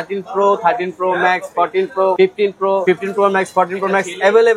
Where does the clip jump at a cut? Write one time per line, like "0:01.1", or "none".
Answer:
0:02.4